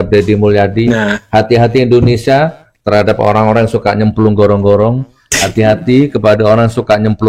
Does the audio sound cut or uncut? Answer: uncut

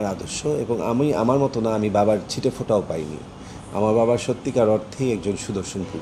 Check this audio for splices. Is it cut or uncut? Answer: uncut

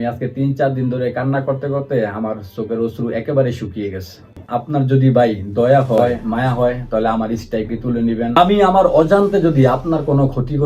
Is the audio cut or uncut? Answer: cut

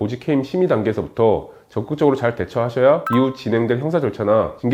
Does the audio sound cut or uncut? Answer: uncut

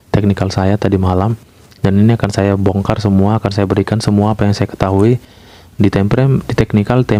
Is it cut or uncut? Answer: uncut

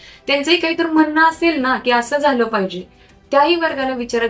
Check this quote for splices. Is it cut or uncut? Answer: uncut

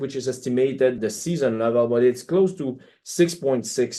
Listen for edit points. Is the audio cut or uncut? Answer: uncut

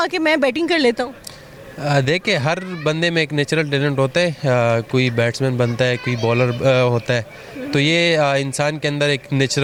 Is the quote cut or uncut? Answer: uncut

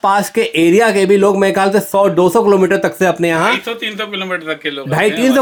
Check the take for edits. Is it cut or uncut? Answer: uncut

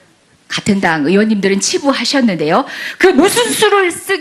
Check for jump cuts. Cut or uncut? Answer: cut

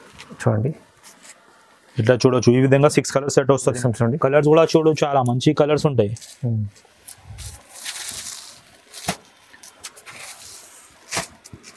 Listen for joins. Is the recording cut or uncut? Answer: cut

